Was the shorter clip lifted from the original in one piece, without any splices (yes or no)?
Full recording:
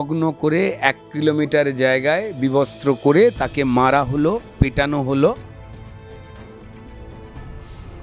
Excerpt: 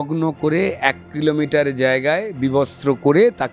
yes